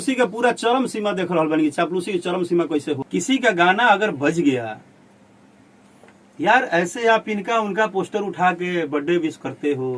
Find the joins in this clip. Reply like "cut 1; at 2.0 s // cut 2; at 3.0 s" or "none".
cut 1; at 3.0 s